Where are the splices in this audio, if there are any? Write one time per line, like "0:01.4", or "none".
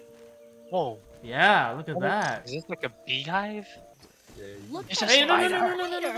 0:04.0